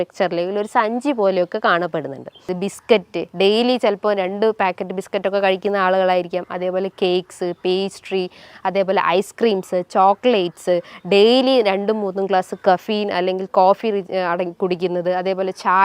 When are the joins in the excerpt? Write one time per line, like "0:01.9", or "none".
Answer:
0:02.5